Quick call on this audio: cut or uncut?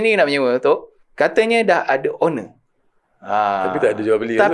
cut